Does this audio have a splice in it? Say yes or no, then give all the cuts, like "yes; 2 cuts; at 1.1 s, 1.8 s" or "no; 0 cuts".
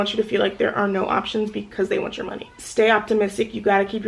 yes; 1 cut; at 2.6 s